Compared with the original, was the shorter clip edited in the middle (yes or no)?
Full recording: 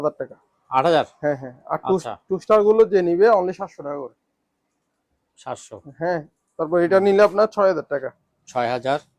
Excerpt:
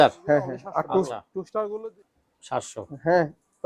yes